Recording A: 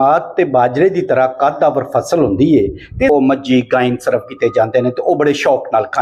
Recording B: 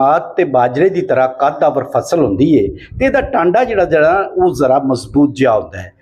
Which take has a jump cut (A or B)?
A